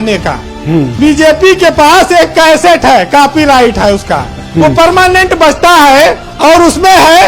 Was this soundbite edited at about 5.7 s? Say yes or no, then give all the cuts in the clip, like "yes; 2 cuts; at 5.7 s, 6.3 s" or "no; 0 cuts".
no; 1 cut; at 0.9 s